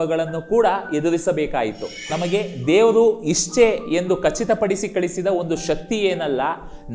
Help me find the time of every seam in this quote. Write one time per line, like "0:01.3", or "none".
0:02.1